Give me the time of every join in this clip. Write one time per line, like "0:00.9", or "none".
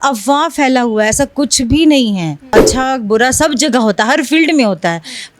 0:02.5